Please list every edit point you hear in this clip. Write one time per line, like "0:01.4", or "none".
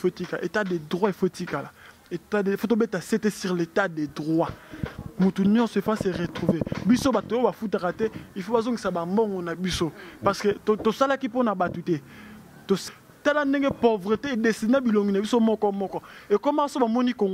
0:12.8